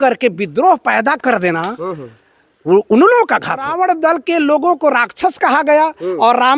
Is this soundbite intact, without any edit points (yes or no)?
no